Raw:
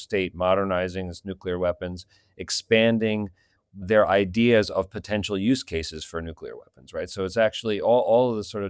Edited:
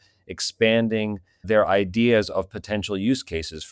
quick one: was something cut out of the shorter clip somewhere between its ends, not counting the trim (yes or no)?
yes